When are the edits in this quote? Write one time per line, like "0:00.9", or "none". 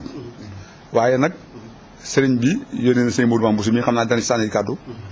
none